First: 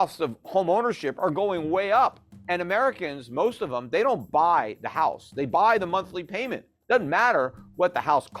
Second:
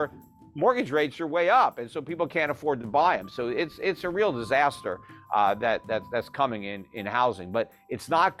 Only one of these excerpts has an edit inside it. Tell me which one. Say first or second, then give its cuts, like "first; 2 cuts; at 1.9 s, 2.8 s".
first; 1 cut; at 2.3 s